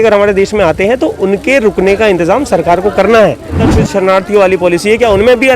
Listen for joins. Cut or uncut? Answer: cut